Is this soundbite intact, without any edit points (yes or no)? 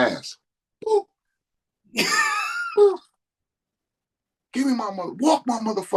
yes